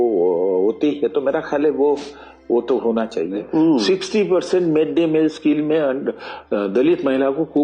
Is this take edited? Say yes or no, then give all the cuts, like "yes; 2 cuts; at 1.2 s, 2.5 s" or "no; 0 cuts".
yes; 1 cut; at 3.5 s